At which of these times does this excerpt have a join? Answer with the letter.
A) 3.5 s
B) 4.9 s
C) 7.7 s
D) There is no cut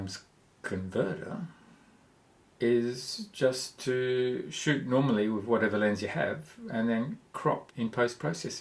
C